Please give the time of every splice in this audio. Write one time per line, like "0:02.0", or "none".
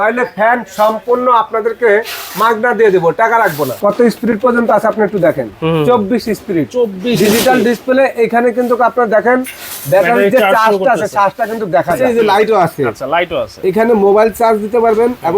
0:03.7
0:12.1

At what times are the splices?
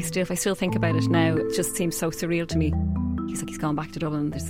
0:03.1

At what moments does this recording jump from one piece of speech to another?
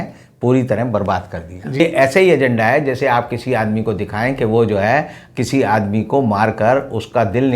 0:01.8

